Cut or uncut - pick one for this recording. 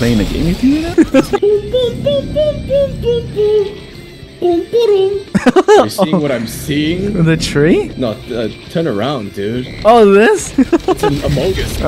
cut